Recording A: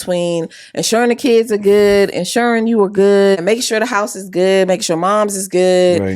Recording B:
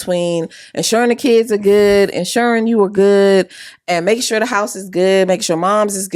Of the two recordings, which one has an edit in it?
A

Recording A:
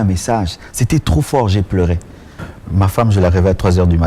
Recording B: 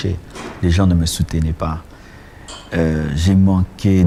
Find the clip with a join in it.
A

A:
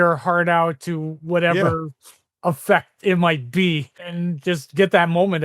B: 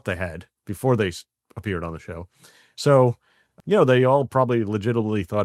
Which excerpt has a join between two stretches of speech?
A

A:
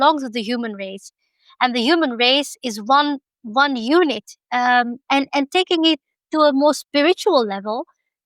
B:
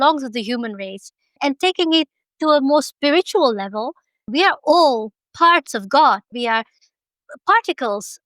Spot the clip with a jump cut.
B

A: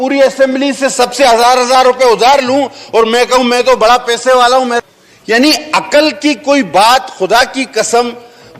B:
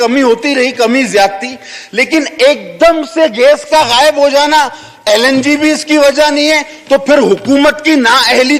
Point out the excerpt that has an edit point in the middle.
A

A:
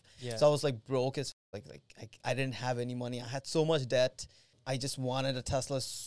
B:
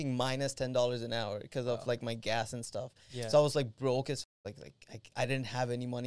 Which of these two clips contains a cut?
A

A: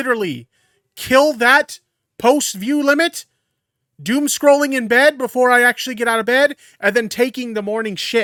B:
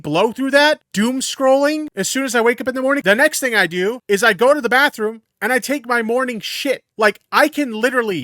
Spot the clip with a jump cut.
B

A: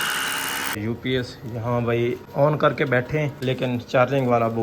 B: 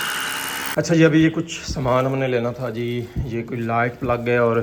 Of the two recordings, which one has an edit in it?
A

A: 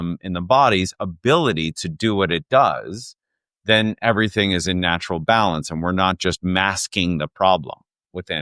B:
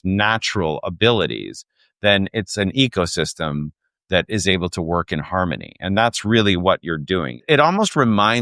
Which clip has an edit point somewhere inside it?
B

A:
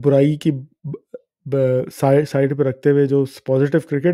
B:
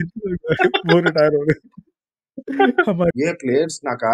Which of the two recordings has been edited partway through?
B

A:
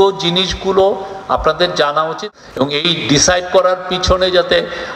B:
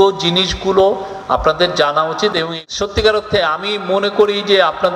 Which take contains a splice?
B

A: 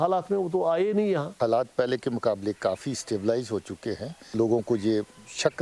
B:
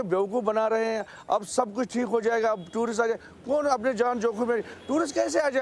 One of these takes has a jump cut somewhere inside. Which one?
A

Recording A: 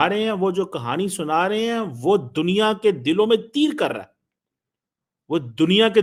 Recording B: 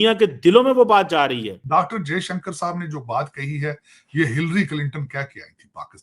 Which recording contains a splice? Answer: B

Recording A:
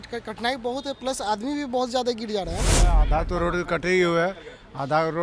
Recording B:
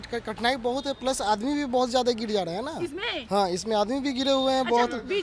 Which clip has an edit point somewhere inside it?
A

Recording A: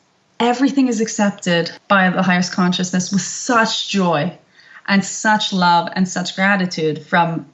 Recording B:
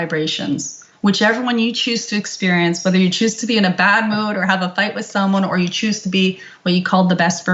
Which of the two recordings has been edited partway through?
A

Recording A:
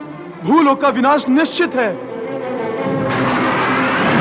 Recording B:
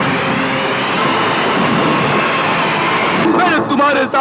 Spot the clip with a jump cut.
B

